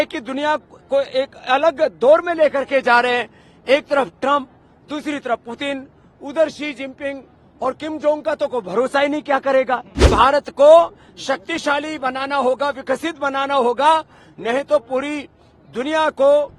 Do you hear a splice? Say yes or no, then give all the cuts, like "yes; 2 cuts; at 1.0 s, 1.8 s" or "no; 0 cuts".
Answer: yes; 1 cut; at 10.1 s